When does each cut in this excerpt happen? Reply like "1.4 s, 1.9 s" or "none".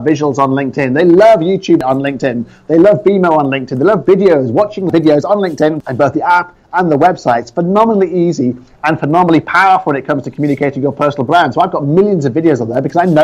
1.8 s, 4.9 s, 5.8 s